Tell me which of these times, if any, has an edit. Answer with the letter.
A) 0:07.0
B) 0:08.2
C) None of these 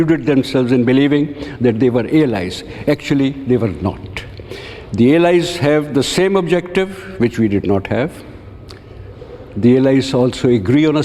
C